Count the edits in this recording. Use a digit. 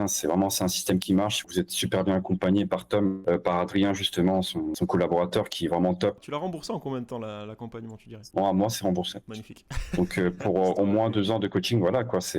2